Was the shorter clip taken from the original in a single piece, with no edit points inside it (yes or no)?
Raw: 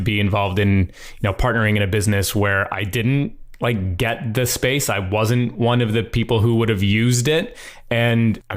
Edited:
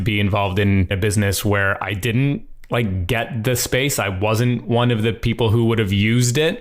no